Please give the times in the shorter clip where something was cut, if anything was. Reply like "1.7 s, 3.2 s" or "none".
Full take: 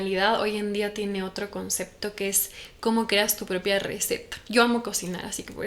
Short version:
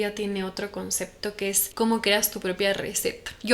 1.6 s